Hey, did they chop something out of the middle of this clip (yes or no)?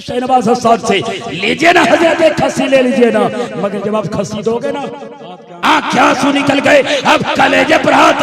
yes